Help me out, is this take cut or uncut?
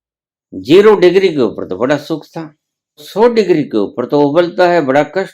cut